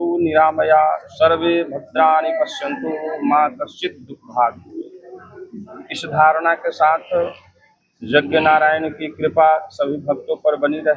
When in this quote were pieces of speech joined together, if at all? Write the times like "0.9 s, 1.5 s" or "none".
none